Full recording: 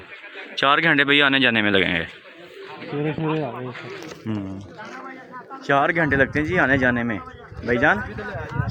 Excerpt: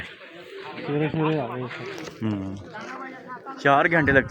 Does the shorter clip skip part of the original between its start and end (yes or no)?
no